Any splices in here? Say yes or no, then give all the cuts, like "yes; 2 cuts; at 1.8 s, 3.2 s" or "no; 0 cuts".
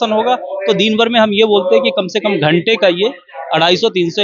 no; 0 cuts